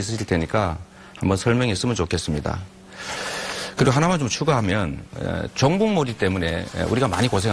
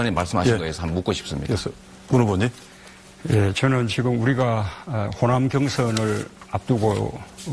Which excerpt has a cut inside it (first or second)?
second